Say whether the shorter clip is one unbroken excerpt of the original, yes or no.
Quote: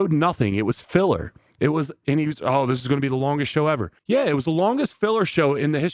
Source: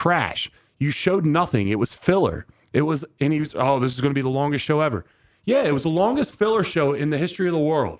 no